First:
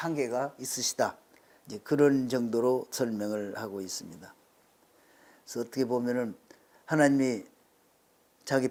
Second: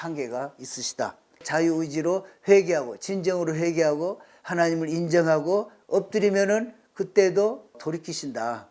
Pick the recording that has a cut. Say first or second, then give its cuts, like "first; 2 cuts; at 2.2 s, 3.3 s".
second; 2 cuts; at 1.5 s, 7.8 s